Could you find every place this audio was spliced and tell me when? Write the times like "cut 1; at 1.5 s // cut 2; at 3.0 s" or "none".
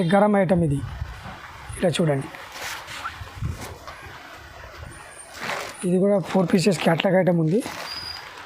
cut 1; at 5.3 s

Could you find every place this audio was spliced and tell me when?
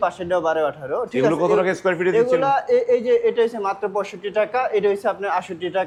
none

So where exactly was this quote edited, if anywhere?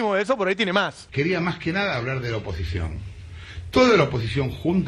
cut 1; at 1.0 s

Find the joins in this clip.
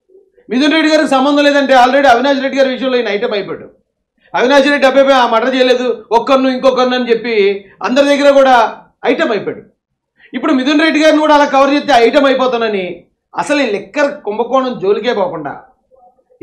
none

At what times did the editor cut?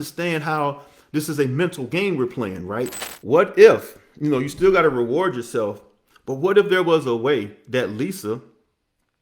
cut 1; at 3.1 s

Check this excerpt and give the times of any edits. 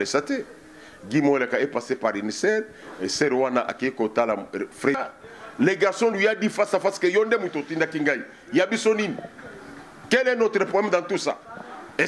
cut 1; at 5.0 s

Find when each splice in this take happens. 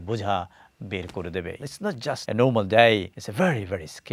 cut 1; at 1.6 s // cut 2; at 3.2 s

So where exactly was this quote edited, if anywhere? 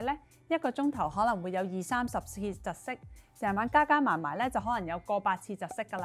none

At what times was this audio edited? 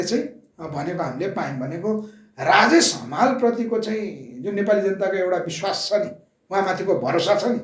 none

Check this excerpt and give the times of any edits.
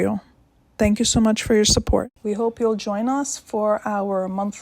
cut 1; at 2.1 s

